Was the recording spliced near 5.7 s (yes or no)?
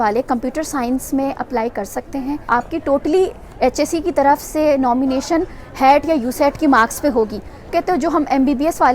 no